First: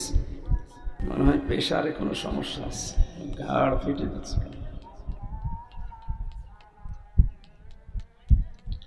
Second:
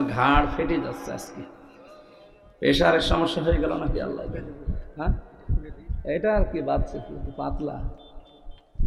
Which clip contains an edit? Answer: first; 1 cut; at 1.0 s

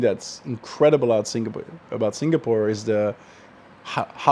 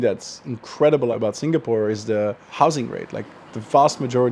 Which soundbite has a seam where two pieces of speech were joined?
second; 2 cuts; at 1.1 s, 2.5 s

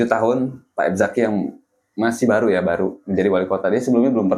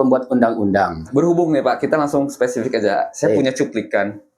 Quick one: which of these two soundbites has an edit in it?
second; 1 cut; at 1.0 s

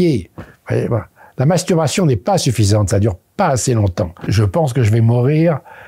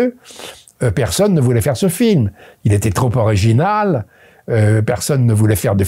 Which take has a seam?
first; 1 cut; at 4.3 s

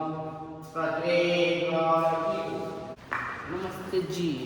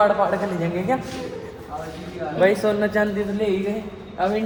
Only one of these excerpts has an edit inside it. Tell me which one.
first; 1 cut; at 2.9 s

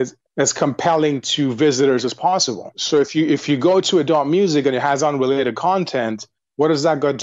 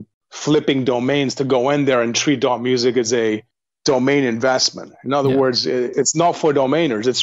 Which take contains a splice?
first; 1 cut; at 2.8 s

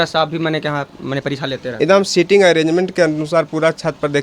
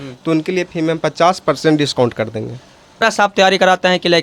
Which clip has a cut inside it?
second; 1 cut; at 3.0 s

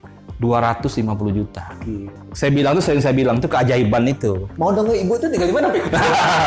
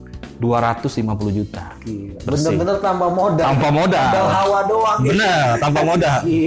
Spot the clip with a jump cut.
first; 2 cuts; at 2.1 s, 4.5 s

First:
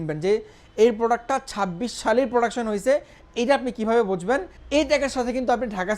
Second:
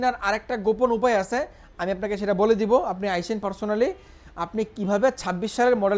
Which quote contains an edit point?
first; 1 cut; at 4.5 s

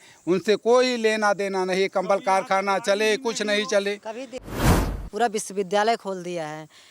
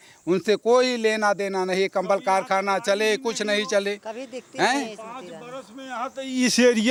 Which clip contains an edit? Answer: first; 1 cut; at 4.6 s

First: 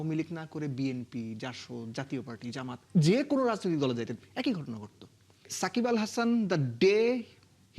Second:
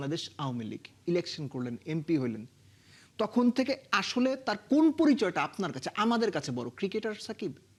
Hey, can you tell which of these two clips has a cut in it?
first; 1 cut; at 5.5 s

